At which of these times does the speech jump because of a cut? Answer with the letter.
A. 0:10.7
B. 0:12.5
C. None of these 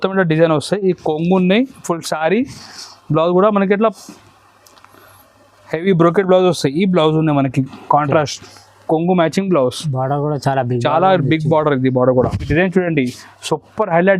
B